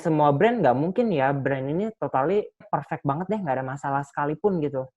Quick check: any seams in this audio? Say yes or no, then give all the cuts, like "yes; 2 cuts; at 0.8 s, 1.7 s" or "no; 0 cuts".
yes; 1 cut; at 2.6 s